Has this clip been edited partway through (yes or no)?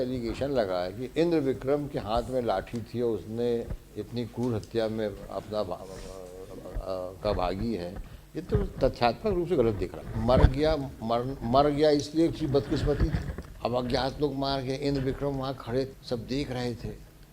yes